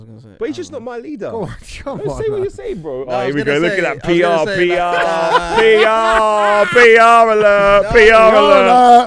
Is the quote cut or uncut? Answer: uncut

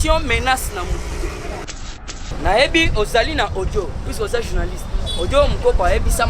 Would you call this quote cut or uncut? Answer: cut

